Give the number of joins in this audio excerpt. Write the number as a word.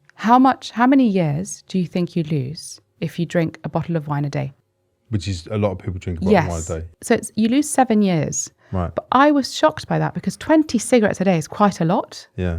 two